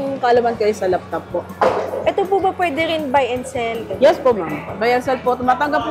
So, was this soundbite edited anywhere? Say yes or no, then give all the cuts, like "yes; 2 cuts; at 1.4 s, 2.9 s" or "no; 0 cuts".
no; 0 cuts